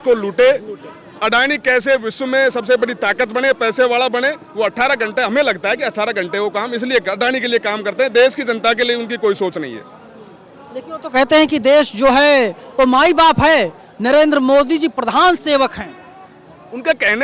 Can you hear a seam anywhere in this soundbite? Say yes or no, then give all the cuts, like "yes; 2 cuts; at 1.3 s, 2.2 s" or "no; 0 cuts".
no; 0 cuts